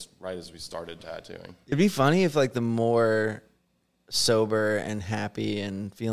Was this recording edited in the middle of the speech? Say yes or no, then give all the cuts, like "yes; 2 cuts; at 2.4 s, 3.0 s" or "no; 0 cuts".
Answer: yes; 1 cut; at 1.7 s